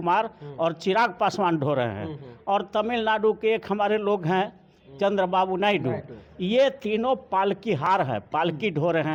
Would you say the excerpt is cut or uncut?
uncut